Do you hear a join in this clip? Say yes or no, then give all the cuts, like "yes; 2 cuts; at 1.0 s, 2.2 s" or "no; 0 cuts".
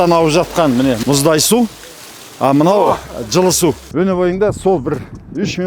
yes; 2 cuts; at 1.0 s, 3.8 s